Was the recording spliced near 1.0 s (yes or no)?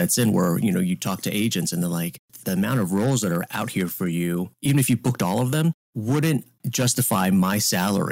no